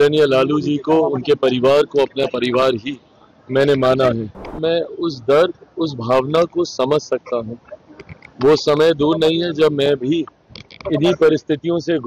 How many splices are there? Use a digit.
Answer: 1